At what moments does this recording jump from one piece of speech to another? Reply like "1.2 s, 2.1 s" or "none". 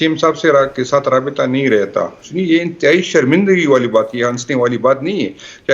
2.2 s

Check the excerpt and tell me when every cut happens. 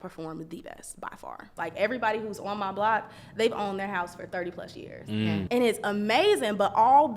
1.5 s, 5.4 s

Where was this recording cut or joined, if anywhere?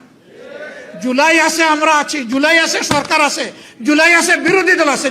none

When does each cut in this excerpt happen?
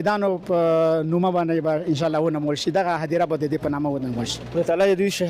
none

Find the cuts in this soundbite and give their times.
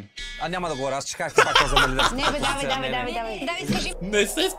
none

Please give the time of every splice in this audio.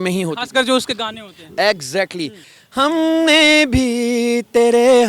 2.4 s

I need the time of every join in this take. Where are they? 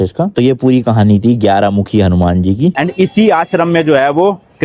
2.8 s

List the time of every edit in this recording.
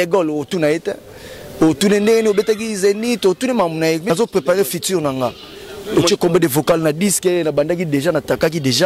4.0 s

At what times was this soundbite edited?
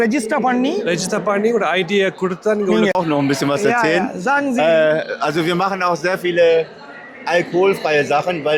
2.9 s

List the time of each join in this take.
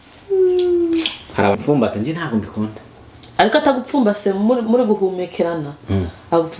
1.6 s

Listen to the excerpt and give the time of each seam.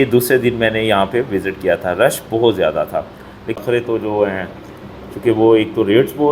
3.5 s

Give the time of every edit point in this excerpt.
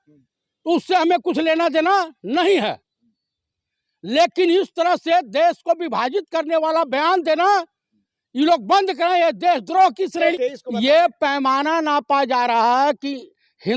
10.2 s

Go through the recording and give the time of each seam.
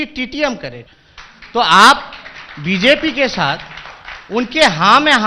1.0 s

